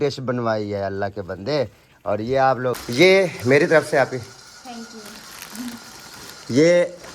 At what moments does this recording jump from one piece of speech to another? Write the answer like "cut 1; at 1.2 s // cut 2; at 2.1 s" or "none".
cut 1; at 2.8 s